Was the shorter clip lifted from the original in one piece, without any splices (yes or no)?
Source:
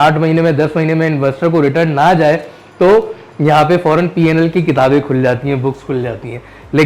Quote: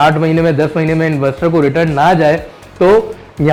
yes